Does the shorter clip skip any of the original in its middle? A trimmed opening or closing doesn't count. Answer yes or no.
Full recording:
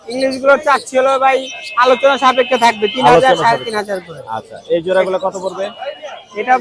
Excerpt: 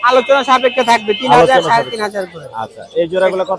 no